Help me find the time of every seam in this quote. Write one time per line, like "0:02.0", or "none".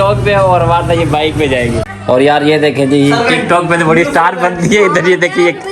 0:02.2